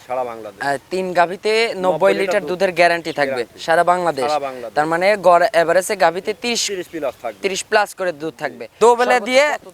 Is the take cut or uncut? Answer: cut